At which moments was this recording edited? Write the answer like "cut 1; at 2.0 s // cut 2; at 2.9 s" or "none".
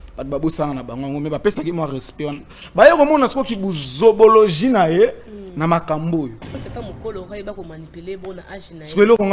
cut 1; at 6.6 s